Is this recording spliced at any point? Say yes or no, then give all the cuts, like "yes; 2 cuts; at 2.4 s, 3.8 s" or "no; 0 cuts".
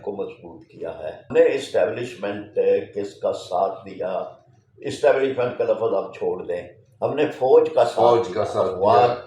yes; 1 cut; at 1.3 s